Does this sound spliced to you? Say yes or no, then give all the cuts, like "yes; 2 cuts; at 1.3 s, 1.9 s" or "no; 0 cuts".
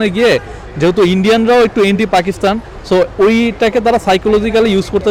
no; 0 cuts